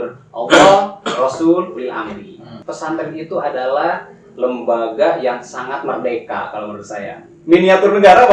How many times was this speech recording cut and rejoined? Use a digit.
1